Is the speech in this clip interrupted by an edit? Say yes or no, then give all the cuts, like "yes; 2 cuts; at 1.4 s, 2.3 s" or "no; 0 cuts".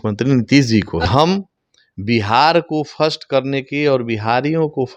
yes; 1 cut; at 1.1 s